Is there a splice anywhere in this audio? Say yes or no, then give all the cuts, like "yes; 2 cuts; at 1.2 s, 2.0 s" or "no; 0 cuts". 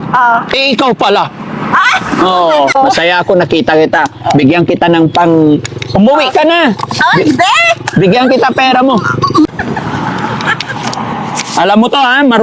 yes; 2 cuts; at 2.8 s, 9.5 s